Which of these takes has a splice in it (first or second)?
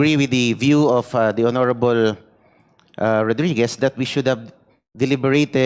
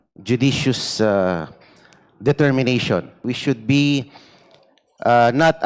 second